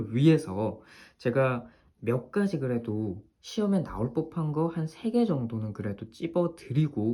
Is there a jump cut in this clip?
no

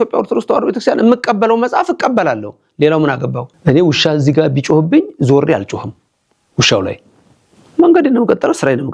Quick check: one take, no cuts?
no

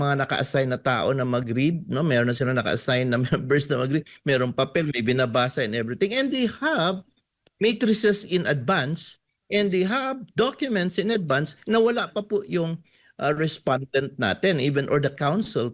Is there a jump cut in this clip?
no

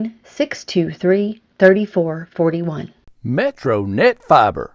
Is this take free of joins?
no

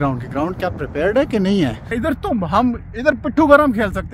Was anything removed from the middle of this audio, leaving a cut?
yes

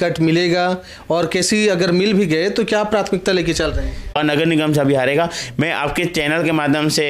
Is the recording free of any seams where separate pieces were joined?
no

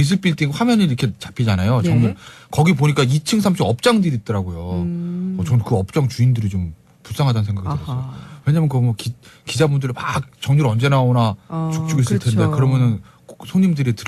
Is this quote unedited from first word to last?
no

